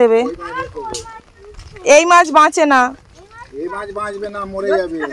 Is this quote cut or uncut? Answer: uncut